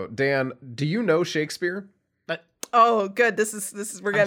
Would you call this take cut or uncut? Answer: uncut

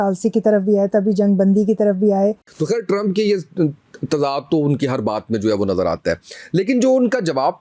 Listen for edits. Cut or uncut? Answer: cut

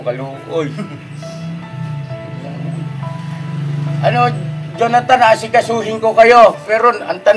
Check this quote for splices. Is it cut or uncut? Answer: uncut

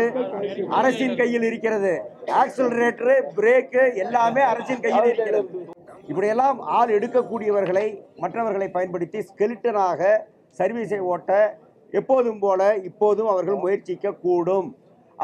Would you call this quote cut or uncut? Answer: cut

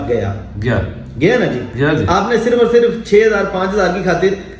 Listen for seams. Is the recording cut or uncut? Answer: uncut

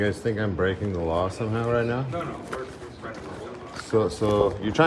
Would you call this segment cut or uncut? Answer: uncut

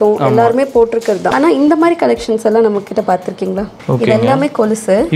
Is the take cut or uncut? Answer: cut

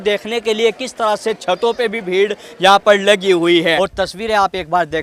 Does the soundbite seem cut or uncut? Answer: cut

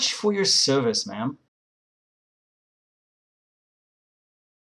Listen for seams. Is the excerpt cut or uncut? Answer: uncut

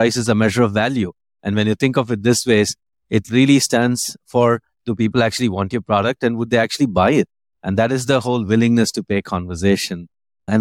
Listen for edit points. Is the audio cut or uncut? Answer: uncut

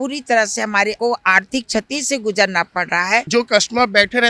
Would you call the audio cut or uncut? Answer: cut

